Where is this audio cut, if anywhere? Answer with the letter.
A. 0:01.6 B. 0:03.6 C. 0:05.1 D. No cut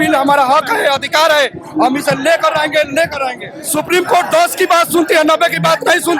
B